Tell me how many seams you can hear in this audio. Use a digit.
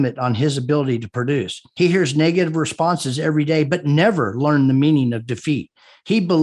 1